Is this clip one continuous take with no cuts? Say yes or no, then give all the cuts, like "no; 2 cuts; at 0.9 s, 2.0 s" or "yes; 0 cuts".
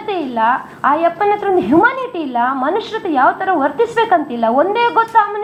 yes; 0 cuts